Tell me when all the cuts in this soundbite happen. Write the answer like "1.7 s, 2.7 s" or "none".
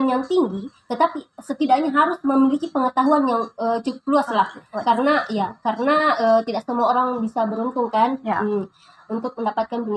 none